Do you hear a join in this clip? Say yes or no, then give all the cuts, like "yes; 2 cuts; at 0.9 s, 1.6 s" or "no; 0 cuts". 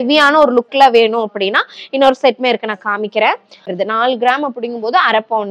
yes; 1 cut; at 3.7 s